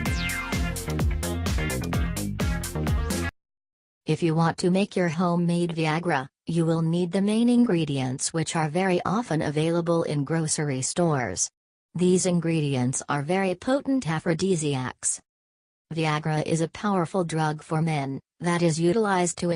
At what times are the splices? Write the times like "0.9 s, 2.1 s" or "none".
7.0 s